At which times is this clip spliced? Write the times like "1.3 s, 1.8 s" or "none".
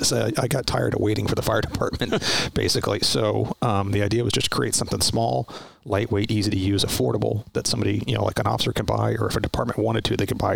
none

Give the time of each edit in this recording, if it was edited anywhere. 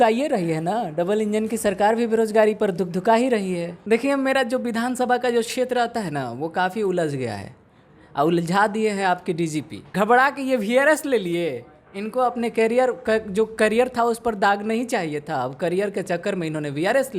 3.7 s, 9.9 s

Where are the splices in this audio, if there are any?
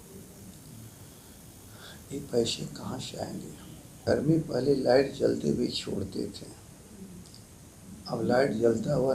4.0 s

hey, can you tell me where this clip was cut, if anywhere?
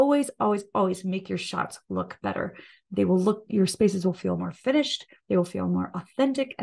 none

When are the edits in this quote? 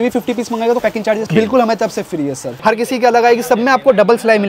2.5 s

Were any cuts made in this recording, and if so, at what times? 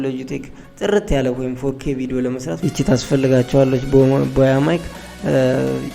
2.5 s

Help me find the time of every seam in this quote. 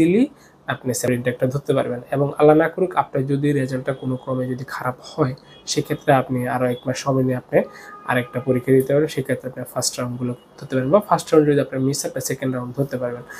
1.1 s

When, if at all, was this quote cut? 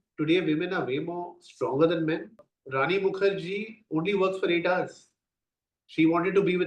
2.4 s

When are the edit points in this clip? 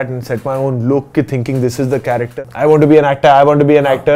2.3 s

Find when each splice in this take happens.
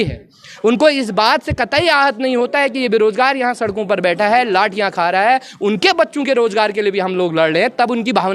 none

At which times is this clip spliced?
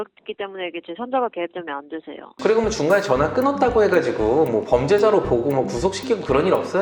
2.3 s

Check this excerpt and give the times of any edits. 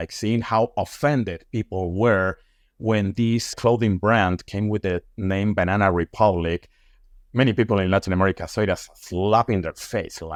none

